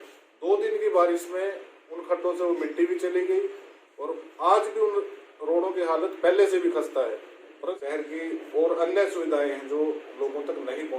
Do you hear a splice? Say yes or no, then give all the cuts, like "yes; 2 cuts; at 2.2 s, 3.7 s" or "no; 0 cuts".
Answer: yes; 1 cut; at 7.7 s